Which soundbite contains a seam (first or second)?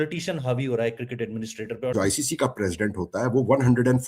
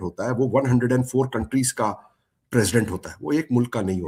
first